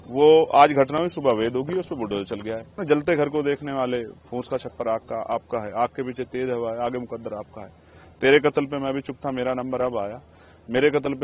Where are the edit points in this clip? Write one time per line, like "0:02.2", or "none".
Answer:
0:02.8